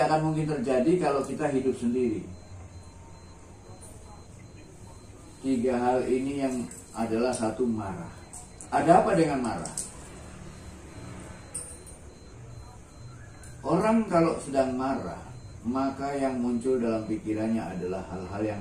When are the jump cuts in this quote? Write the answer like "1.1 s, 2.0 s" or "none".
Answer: 3.6 s, 8.6 s